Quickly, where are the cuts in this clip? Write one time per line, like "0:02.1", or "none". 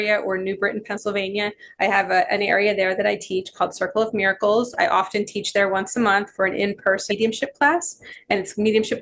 none